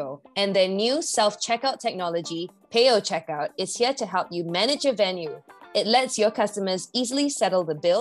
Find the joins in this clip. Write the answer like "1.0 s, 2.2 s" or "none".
none

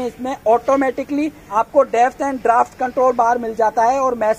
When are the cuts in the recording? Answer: 1.4 s

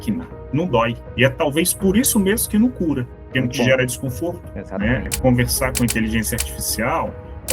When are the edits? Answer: none

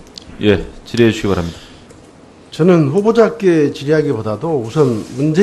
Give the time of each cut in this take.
none

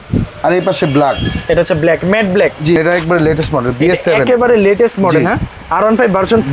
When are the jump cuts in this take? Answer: 2.8 s

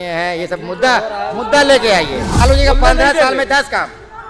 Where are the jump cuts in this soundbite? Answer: 2.4 s

